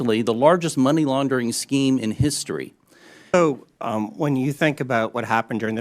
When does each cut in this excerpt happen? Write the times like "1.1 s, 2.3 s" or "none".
3.3 s